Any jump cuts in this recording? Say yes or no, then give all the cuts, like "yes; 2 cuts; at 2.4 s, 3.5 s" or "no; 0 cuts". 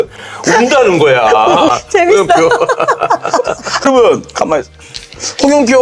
no; 0 cuts